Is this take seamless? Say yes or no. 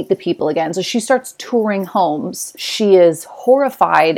no